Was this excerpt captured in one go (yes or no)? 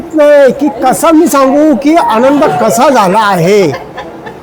yes